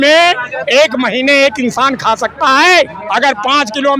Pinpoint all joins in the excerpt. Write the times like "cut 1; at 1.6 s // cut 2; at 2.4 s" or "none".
cut 1; at 3.0 s

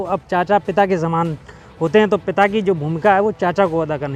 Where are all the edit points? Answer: none

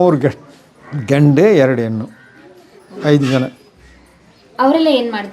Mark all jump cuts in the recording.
none

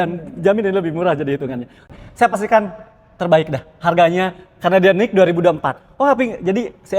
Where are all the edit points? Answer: cut 1; at 1.8 s

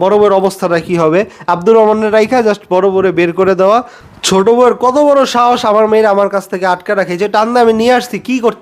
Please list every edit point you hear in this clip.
cut 1; at 4.0 s

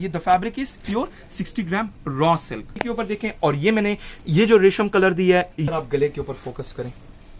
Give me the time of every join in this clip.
cut 1; at 2.7 s // cut 2; at 5.6 s

